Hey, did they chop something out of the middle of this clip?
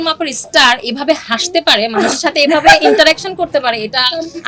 no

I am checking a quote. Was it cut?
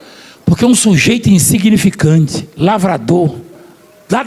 no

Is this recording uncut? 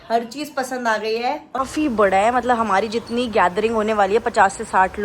no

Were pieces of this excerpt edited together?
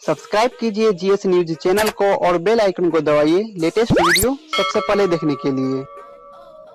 no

